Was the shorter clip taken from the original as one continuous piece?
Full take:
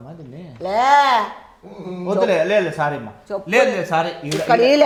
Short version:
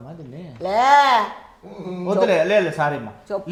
yes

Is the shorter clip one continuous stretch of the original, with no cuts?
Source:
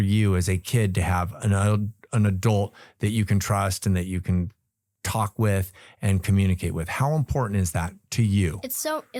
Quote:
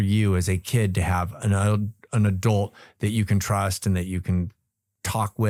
yes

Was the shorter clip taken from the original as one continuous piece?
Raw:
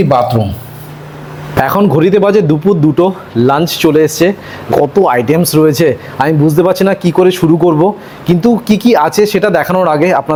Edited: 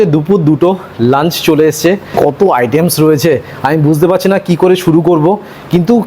no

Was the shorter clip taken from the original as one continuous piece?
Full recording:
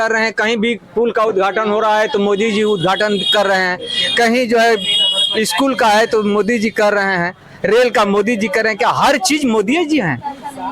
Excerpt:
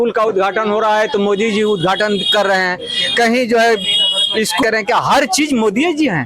no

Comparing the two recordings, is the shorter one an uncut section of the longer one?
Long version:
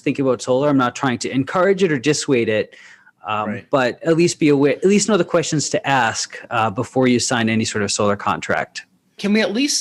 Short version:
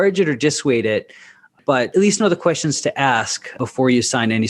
no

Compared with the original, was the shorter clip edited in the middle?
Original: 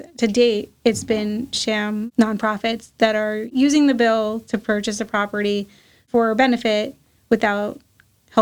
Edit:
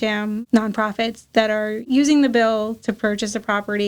no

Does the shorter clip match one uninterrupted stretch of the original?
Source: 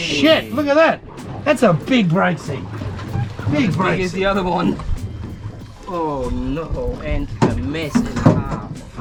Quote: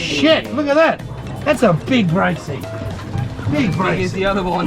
yes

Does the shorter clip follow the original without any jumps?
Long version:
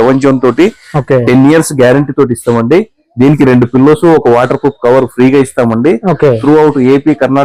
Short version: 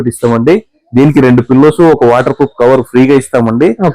yes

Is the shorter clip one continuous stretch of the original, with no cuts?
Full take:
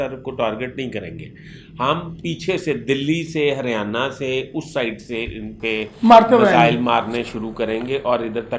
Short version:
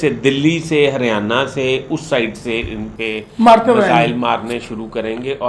yes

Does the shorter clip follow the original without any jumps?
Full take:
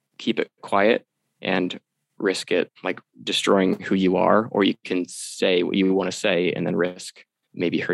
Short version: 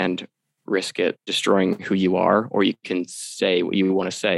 no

